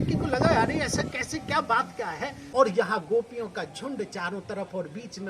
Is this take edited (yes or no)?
yes